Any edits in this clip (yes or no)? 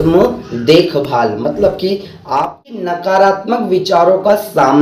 yes